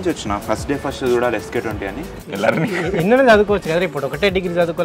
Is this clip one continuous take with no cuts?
no; 1 cut; at 2.2 s

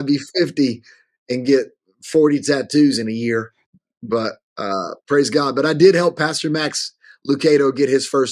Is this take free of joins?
yes; 0 cuts

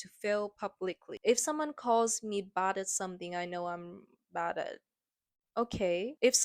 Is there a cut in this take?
yes; 1 cut; at 1.1 s

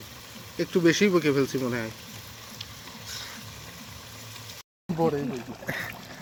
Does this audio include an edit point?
no; 0 cuts

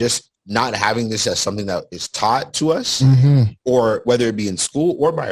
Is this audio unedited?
no; 1 cut; at 2.5 s

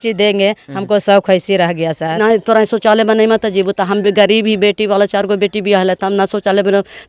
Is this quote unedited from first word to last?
no; 1 cut; at 2.2 s

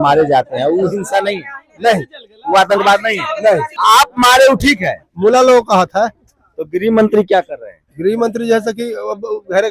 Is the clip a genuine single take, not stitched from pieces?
no; 2 cuts; at 3.7 s, 5.0 s

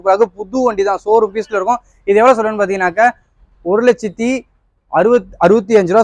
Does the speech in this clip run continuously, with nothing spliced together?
yes; 0 cuts

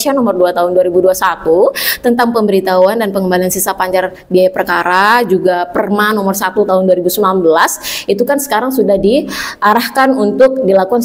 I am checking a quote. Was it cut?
no; 0 cuts

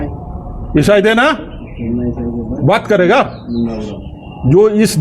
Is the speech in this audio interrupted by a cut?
no; 0 cuts

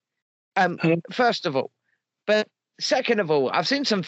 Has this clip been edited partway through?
no; 0 cuts

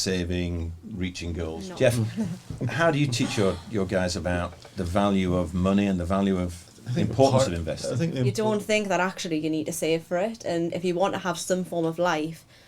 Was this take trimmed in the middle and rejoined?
yes; 2 cuts; at 1.6 s, 8.3 s

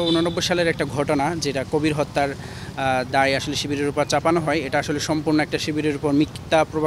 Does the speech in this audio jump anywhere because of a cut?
no; 0 cuts

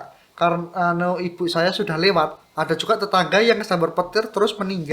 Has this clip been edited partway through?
yes; 1 cut; at 2.4 s

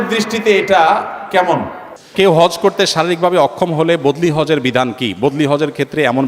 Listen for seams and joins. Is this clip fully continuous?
no; 1 cut; at 2.1 s

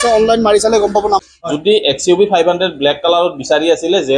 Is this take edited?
yes; 1 cut; at 1.2 s

